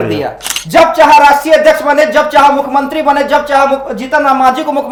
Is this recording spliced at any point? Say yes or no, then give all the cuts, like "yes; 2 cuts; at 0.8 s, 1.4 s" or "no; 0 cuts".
no; 0 cuts